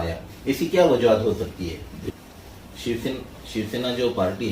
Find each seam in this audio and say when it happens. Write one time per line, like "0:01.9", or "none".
0:02.1